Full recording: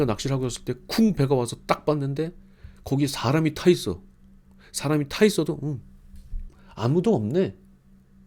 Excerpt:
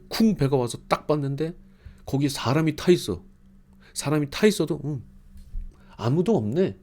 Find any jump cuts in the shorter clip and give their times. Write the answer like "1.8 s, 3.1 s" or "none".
none